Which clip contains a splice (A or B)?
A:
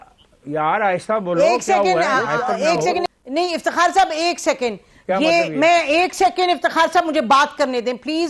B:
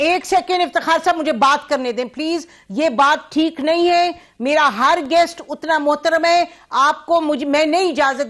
A